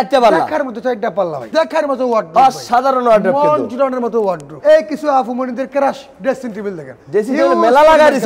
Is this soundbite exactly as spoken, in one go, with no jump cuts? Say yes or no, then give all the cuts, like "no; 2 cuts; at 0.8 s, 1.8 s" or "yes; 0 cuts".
no; 2 cuts; at 1.5 s, 4.5 s